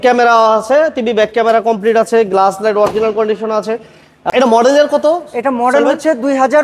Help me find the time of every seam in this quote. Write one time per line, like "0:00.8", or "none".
0:04.3

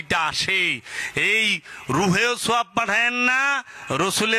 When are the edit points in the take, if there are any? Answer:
none

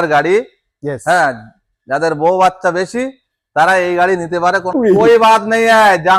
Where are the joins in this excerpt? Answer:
0:04.7

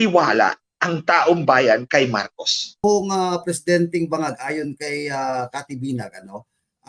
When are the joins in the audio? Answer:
0:02.8

